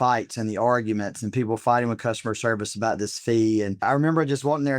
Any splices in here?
yes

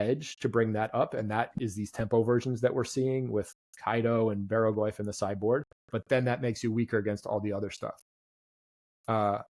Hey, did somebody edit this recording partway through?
no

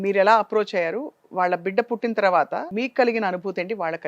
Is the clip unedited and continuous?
no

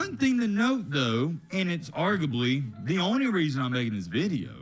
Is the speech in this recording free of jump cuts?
yes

